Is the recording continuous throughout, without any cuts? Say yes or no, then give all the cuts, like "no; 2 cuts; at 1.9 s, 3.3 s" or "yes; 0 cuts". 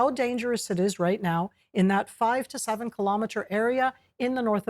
no; 1 cut; at 2.6 s